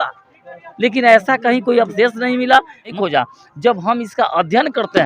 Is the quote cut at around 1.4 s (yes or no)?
no